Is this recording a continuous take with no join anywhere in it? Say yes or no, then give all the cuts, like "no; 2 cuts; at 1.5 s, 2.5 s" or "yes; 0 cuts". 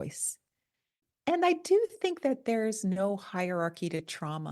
no; 1 cut; at 1.0 s